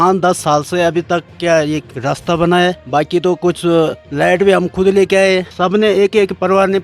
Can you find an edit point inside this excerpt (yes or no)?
yes